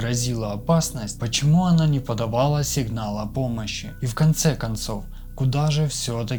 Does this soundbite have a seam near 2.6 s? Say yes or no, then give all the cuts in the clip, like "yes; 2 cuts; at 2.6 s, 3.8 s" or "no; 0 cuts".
no; 0 cuts